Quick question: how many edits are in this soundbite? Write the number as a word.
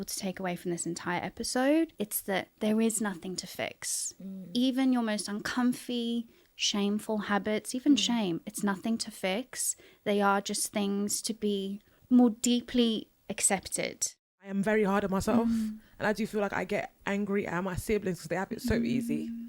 three